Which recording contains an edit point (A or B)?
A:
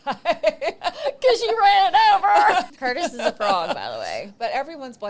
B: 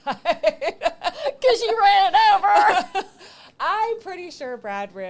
A